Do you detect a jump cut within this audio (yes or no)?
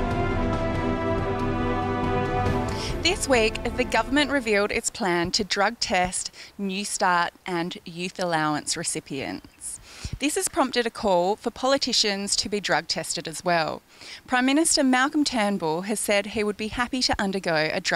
yes